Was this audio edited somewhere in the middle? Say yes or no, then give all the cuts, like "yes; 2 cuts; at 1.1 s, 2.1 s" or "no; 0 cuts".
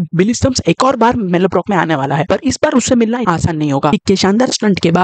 yes; 1 cut; at 3.9 s